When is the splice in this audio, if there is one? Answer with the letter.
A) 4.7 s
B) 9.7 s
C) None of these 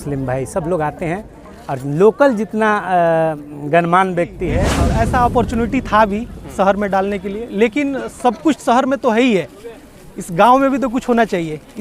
A